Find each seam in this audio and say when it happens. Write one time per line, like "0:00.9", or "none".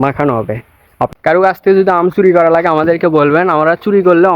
0:01.1